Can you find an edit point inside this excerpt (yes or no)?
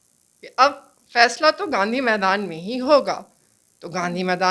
no